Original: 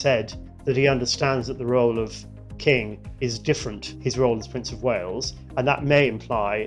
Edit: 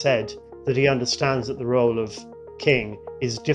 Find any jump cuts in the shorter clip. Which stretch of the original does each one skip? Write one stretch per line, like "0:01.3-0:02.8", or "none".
none